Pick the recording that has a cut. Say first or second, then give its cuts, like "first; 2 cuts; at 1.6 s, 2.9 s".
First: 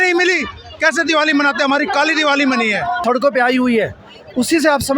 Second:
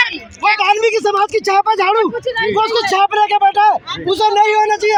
first; 1 cut; at 3.0 s